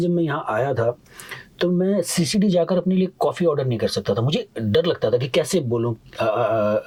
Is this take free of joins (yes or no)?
yes